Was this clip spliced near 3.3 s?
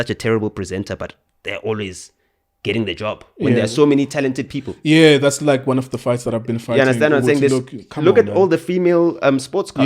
no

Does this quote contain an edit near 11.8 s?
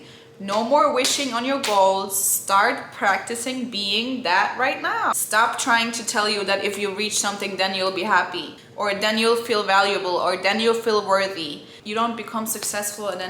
yes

